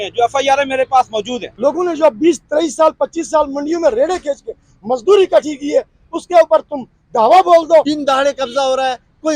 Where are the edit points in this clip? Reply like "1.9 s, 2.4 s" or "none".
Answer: 1.4 s, 7.9 s